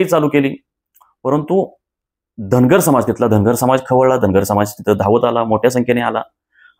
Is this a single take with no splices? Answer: yes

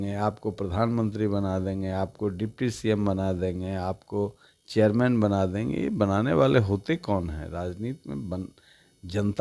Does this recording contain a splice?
no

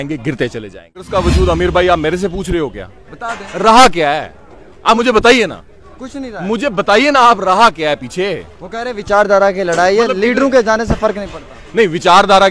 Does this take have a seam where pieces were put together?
yes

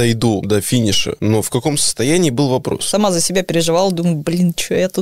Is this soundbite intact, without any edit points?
no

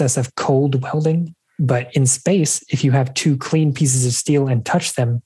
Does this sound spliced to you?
yes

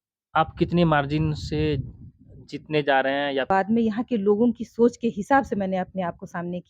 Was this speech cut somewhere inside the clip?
yes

